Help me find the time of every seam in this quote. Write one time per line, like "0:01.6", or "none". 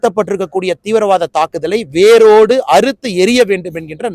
none